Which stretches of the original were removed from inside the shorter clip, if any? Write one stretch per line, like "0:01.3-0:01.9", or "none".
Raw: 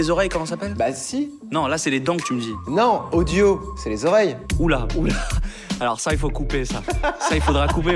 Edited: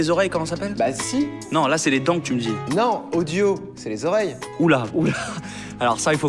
none